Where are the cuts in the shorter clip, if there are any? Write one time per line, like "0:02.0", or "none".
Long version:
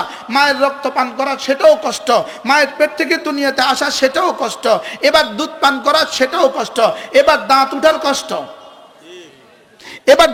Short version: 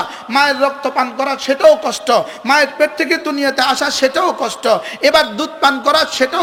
none